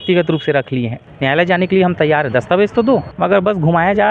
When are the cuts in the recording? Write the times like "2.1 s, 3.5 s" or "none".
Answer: 1.0 s, 3.1 s

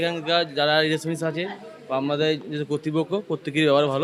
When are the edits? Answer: none

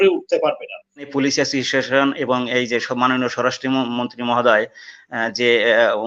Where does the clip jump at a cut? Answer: 1.1 s

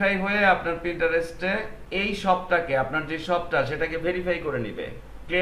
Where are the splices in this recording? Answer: 1.8 s

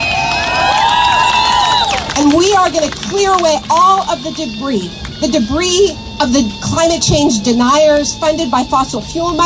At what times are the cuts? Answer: 1.2 s

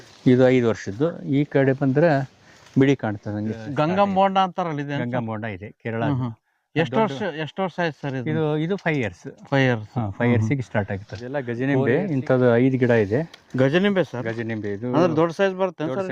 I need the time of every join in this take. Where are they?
3.7 s, 11.3 s

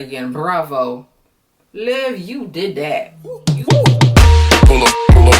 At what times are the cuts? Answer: 3.5 s

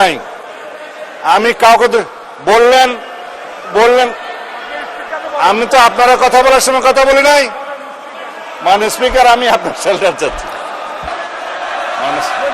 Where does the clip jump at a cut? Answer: 11.1 s

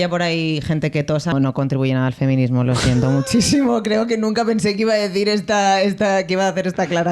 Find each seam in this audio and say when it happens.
1.3 s

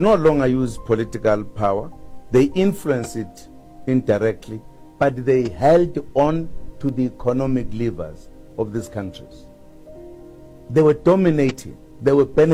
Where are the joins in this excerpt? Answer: none

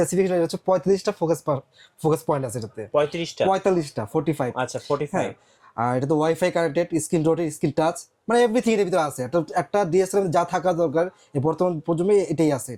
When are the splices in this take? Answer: none

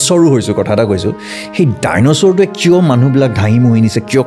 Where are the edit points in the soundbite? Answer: none

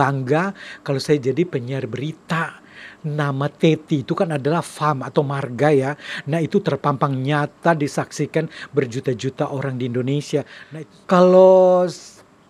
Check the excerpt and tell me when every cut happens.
10.6 s

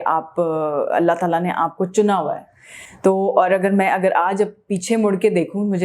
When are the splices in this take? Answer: none

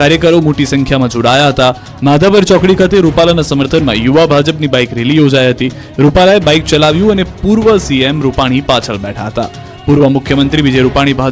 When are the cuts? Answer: 2.3 s

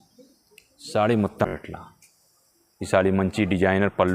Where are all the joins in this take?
1.5 s

